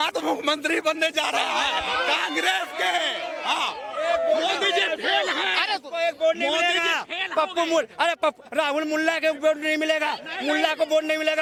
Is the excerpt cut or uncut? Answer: uncut